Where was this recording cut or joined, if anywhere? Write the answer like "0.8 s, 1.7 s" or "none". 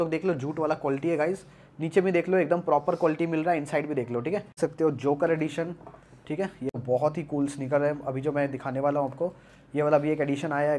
4.6 s, 6.8 s